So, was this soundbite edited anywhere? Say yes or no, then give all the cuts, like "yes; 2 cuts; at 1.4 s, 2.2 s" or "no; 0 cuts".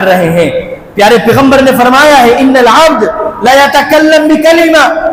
no; 0 cuts